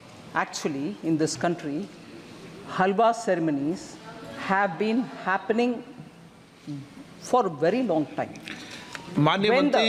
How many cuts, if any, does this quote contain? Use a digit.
0